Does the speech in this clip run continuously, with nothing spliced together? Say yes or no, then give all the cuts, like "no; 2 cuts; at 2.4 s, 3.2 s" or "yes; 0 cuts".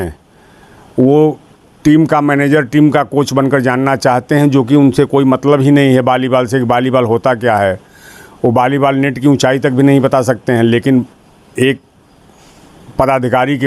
yes; 0 cuts